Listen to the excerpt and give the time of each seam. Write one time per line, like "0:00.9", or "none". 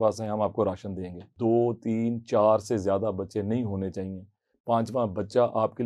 0:01.3